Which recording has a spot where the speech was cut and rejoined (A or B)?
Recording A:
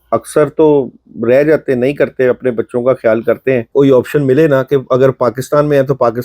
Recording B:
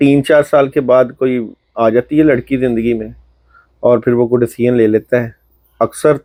A